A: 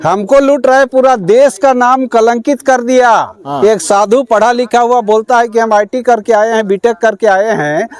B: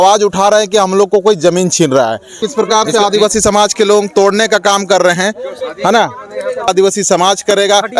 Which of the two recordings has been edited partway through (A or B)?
B